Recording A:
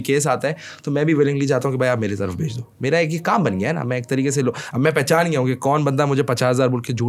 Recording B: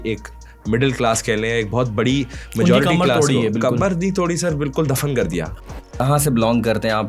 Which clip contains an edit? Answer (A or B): B